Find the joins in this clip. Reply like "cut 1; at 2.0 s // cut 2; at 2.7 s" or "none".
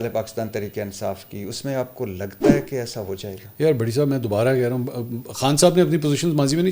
none